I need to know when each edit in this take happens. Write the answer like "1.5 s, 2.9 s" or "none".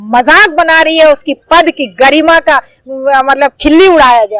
none